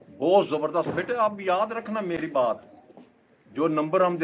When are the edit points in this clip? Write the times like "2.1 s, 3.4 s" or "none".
none